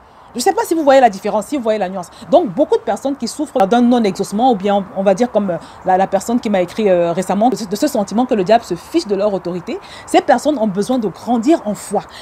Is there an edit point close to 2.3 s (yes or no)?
no